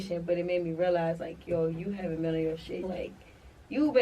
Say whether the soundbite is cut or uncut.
cut